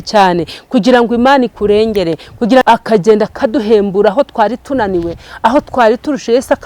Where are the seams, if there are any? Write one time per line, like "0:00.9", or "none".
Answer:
0:02.6